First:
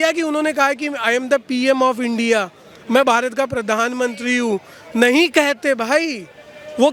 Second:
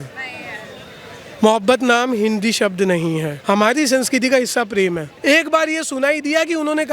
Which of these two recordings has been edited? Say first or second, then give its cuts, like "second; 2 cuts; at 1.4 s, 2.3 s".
second; 2 cuts; at 3.3 s, 5.1 s